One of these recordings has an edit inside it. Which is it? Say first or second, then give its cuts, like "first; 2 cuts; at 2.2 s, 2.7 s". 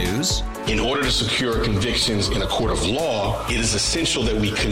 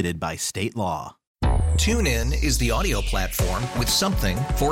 second; 1 cut; at 1.2 s